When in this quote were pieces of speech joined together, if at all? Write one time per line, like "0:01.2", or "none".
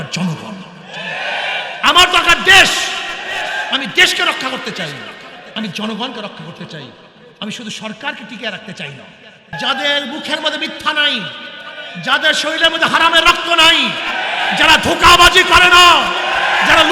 0:09.5